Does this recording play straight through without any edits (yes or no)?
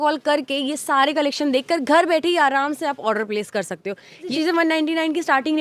no